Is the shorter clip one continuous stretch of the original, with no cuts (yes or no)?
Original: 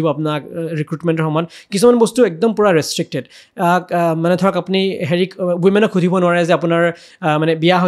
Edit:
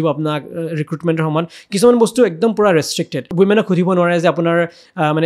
no